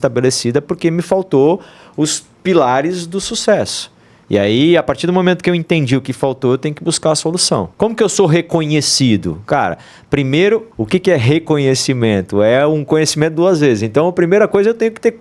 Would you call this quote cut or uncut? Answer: cut